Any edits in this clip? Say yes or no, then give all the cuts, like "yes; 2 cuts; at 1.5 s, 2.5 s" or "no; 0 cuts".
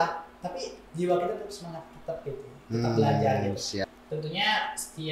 yes; 1 cut; at 3.8 s